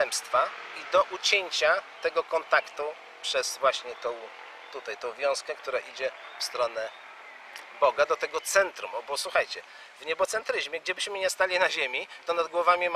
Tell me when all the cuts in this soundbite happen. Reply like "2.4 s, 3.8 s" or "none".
2.9 s